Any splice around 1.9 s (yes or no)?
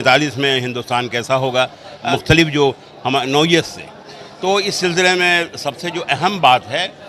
yes